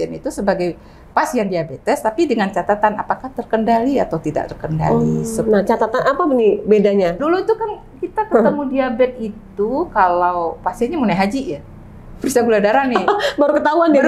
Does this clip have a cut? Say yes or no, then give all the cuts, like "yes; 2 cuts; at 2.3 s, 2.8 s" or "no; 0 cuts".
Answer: yes; 1 cut; at 7.2 s